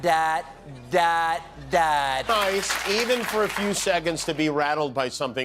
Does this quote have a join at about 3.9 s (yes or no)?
no